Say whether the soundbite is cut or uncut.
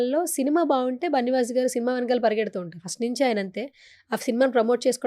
uncut